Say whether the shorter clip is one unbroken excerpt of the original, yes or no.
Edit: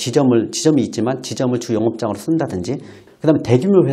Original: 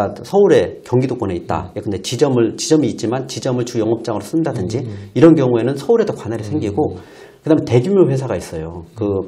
no